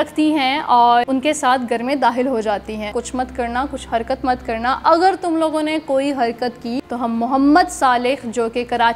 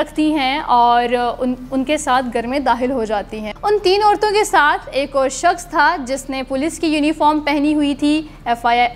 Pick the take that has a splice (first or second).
first